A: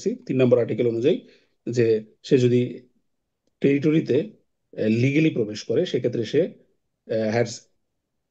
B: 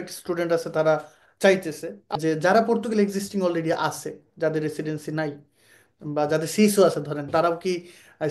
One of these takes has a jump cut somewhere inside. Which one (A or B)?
B